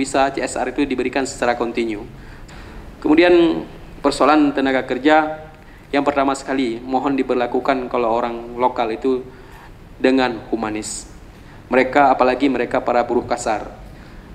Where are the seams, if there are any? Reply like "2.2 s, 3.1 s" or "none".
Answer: 2.3 s